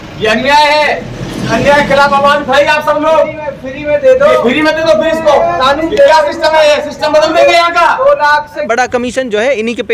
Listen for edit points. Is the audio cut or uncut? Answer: cut